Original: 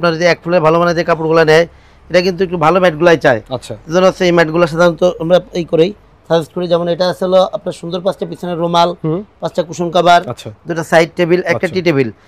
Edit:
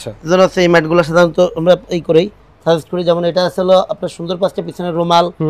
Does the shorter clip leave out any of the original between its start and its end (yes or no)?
no